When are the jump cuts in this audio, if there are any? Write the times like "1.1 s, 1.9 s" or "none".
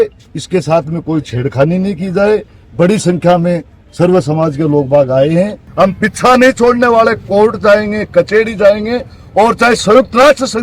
5.6 s